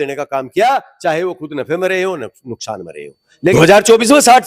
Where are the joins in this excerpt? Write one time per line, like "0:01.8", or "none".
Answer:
0:03.5